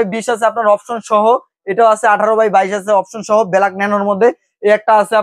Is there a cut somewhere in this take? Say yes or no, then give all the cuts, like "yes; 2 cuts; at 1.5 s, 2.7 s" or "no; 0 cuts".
no; 0 cuts